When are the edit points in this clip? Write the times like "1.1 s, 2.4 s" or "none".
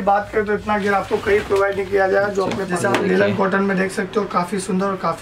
2.6 s